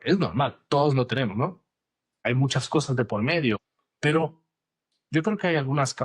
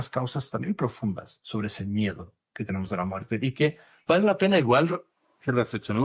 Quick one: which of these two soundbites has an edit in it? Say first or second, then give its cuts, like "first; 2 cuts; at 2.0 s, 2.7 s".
first; 2 cuts; at 2.2 s, 3.6 s